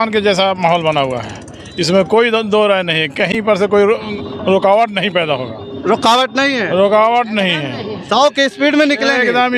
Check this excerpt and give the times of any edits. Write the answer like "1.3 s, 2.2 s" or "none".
none